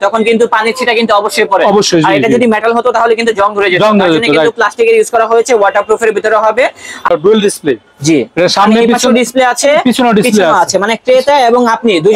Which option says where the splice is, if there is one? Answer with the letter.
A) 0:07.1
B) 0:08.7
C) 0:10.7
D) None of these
A